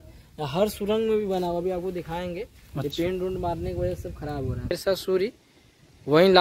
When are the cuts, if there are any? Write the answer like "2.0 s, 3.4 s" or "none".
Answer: 4.7 s